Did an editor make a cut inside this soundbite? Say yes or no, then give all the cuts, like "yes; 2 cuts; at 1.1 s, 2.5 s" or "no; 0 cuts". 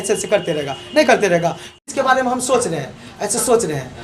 yes; 1 cut; at 1.7 s